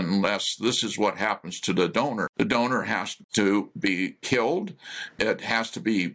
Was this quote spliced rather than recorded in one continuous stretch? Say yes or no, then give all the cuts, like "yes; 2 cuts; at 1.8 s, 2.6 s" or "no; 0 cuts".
yes; 2 cuts; at 2.3 s, 3.2 s